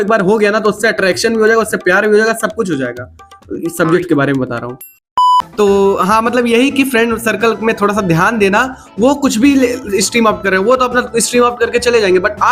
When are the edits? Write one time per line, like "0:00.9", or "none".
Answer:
none